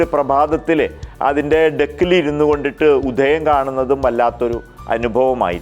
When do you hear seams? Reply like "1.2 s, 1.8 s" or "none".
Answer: none